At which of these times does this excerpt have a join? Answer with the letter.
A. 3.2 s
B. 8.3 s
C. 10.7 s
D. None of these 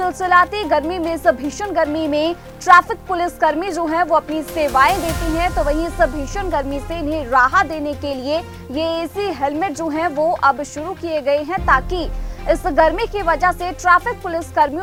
D